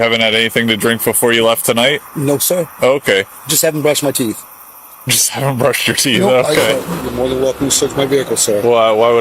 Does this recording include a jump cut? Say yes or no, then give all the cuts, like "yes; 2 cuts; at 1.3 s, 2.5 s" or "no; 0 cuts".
yes; 1 cut; at 6.8 s